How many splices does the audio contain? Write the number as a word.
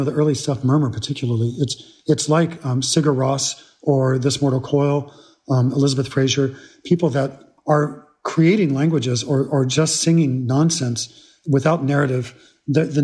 one